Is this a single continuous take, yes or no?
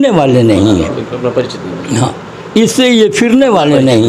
yes